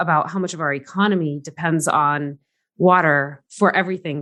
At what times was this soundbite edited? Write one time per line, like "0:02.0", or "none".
none